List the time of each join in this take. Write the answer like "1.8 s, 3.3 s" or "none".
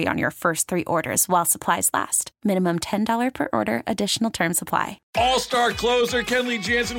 5.0 s

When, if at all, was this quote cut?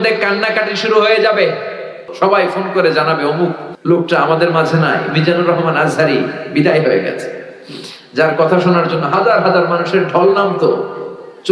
2.0 s, 3.7 s

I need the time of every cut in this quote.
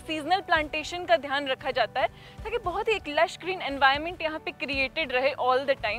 none

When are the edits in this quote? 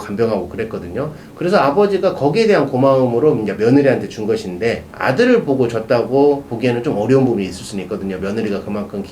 4.9 s

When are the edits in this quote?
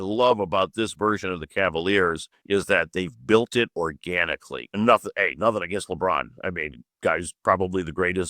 2.3 s, 4.7 s

